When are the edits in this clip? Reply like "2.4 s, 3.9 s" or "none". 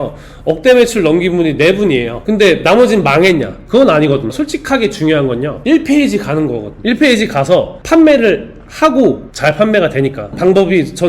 2.2 s, 4.3 s